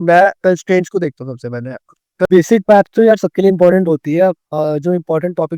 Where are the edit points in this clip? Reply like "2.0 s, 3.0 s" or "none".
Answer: 2.3 s